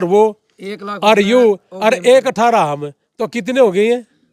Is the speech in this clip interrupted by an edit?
no; 0 cuts

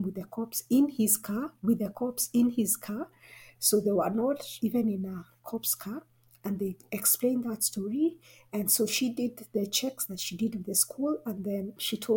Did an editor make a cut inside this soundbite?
no; 0 cuts

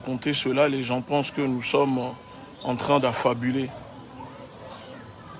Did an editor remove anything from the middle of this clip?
no; 0 cuts

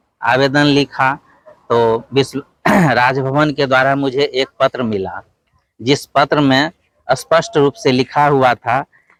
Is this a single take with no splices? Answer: yes; 0 cuts

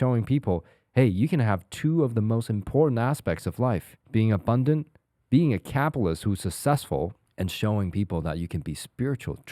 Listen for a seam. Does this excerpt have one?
yes; 2 cuts; at 3.9 s, 7.2 s

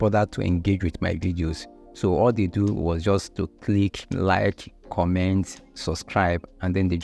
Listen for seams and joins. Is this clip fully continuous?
no; 1 cut; at 4.1 s

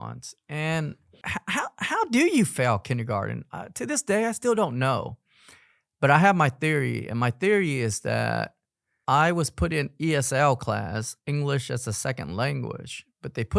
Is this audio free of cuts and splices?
no; 1 cut; at 1.2 s

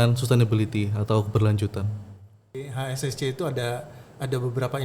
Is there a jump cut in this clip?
yes; 1 cut; at 2.6 s

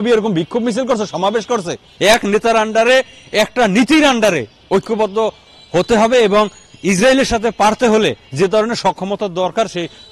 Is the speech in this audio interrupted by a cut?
yes; 1 cut; at 1.8 s

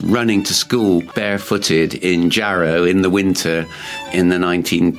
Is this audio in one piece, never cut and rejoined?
no; 1 cut; at 1.1 s

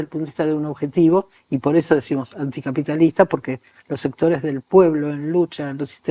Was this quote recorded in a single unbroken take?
yes; 0 cuts

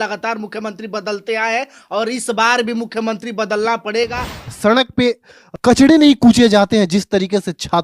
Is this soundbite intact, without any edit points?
no; 2 cuts; at 4.4 s, 5.5 s

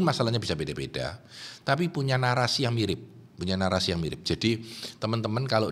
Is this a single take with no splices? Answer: yes; 0 cuts

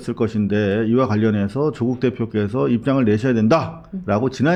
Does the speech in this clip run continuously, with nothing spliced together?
yes; 0 cuts

